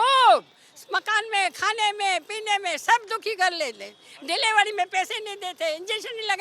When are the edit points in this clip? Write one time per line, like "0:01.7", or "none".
none